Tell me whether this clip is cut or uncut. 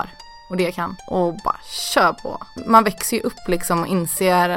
cut